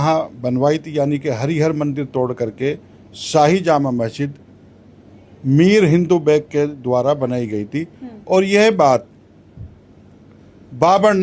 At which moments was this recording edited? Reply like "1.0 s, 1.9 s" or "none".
none